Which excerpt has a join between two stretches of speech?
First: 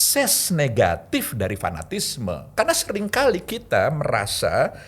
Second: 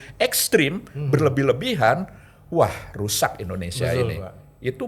first; 1 cut; at 2.4 s

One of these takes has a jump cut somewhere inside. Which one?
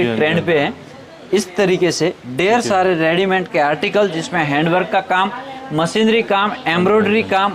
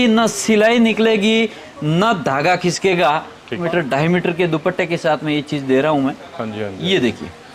second; 1 cut; at 3.6 s

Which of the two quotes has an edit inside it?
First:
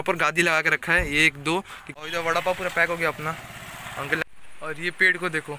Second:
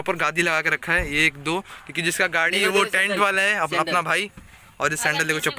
first; 2 cuts; at 1.9 s, 4.2 s

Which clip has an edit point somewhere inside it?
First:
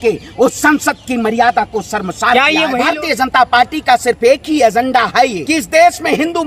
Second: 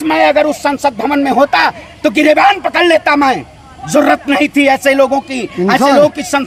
first; 2 cuts; at 2.8 s, 5.4 s

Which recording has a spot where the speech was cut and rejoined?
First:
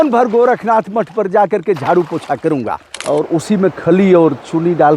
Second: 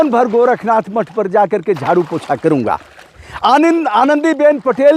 first; 1 cut; at 2.9 s

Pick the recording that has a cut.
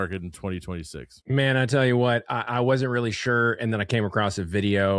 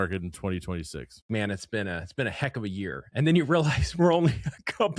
second; 1 cut; at 1.2 s

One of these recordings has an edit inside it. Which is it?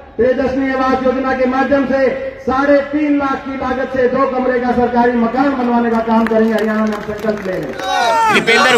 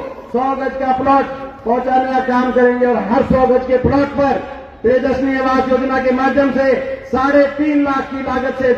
first; 1 cut; at 7.9 s

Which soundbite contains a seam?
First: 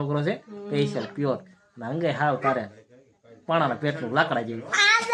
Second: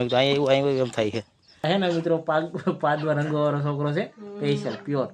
second; 1 cut; at 1.6 s

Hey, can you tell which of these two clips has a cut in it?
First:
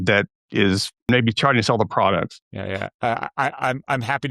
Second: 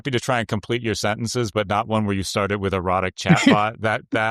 first; 2 cuts; at 1.1 s, 2.4 s

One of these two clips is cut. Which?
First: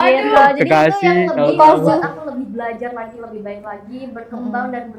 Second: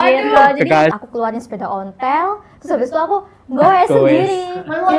second; 1 cut; at 1.0 s

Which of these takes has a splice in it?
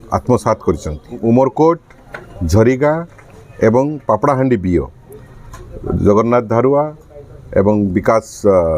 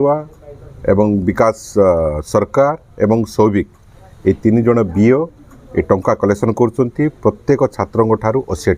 first; 1 cut; at 1.2 s

